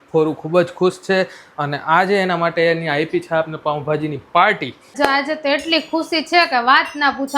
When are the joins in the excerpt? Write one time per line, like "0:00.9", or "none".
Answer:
0:04.9